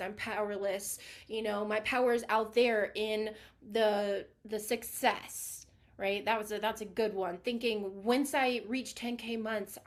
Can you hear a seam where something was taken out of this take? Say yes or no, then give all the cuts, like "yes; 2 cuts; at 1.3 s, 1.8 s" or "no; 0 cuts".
no; 0 cuts